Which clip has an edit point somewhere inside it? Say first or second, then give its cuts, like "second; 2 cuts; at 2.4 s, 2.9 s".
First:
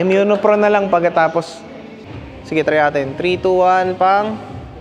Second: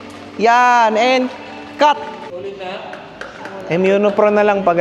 first; 1 cut; at 2.0 s